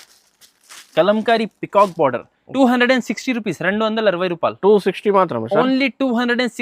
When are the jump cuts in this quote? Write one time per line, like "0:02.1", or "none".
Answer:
0:02.4